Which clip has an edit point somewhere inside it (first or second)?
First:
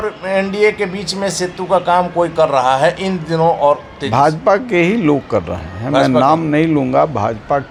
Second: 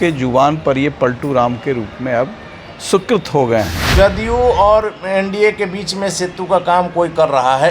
second